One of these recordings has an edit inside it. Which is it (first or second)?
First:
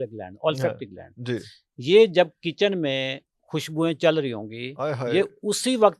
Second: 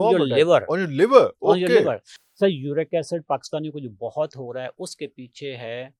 second